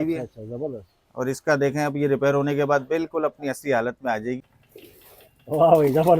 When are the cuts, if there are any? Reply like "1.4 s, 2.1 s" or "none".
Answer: 4.4 s